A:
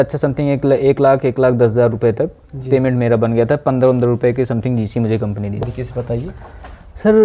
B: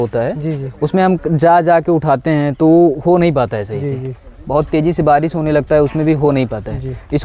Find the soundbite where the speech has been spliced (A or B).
A